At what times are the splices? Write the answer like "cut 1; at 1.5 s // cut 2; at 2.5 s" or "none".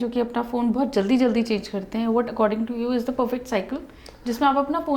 none